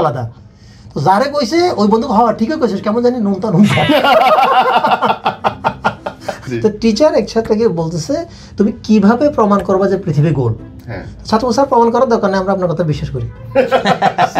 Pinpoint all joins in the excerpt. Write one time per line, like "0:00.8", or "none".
0:06.3

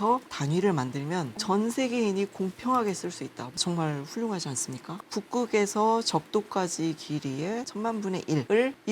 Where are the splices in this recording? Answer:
0:05.0

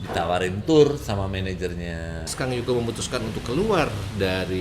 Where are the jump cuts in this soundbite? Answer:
0:02.3

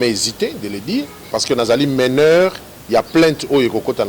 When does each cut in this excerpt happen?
0:01.3

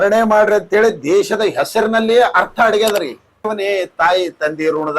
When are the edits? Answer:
0:03.5

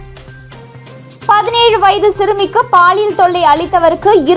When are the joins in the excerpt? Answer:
none

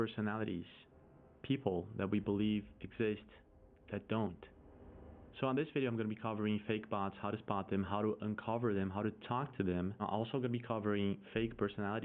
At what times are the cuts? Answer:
none

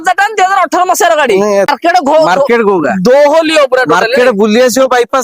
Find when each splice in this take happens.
0:01.7

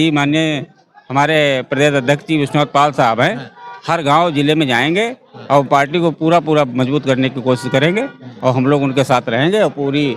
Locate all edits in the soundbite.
none

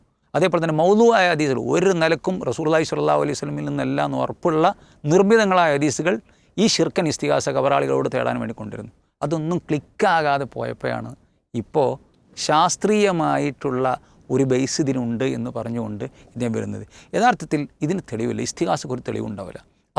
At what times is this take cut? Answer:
none

